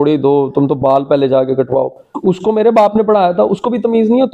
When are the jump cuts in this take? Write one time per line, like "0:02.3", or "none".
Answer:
0:02.1

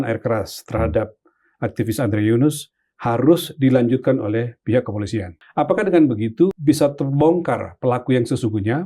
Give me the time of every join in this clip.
0:05.4
0:06.5

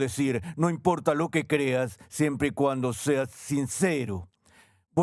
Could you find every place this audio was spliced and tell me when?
none

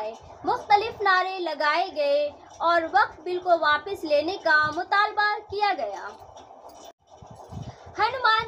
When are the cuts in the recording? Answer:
0:07.0

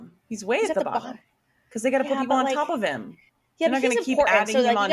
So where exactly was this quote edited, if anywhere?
none

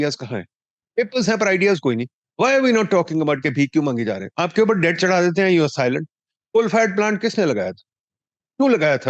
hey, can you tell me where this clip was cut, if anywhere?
0:02.2
0:04.3

